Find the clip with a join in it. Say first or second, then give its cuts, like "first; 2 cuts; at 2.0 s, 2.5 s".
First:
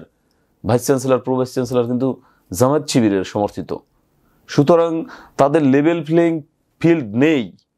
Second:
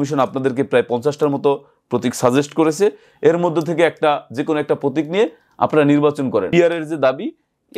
second; 1 cut; at 6.5 s